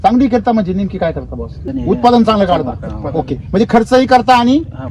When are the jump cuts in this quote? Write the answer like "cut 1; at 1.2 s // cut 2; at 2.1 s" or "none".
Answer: cut 1; at 1.7 s